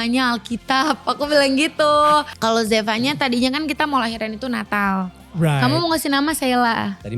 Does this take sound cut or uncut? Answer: cut